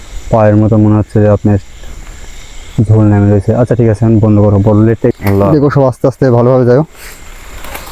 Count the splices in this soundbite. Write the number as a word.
one